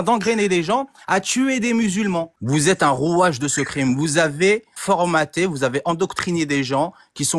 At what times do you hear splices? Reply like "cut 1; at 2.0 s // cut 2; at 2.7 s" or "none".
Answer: cut 1; at 2.4 s // cut 2; at 4.8 s